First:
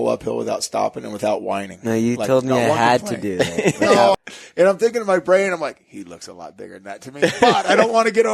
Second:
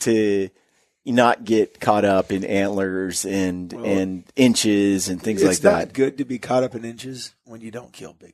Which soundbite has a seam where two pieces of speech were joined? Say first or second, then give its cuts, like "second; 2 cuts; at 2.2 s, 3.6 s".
first; 1 cut; at 4.1 s